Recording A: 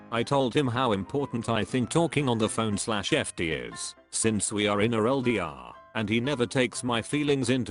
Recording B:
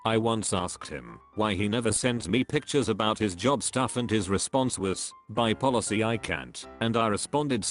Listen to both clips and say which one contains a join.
B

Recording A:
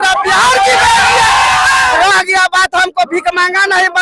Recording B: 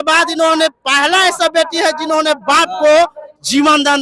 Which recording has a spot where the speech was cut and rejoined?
A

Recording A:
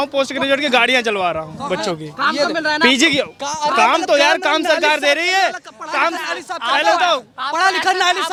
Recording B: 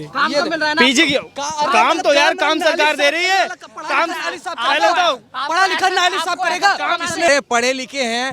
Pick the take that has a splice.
B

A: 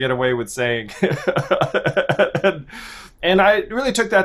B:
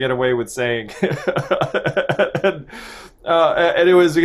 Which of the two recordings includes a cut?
A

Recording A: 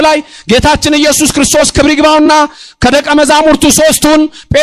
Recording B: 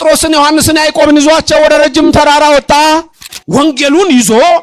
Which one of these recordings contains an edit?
B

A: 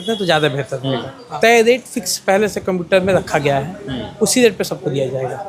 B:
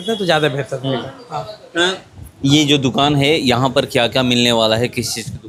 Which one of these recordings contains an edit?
A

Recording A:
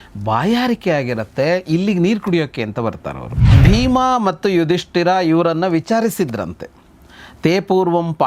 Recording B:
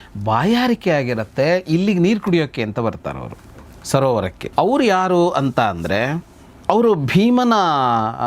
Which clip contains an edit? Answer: A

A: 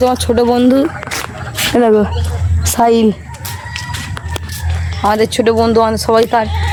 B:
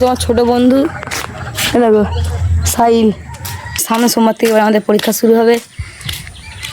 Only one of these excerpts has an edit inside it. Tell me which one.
B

